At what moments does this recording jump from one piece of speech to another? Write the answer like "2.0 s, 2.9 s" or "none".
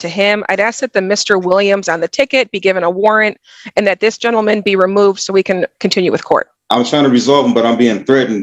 6.6 s